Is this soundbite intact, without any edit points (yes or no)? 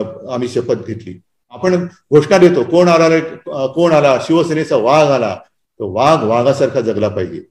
no